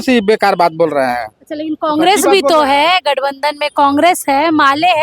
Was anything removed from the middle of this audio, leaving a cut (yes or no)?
no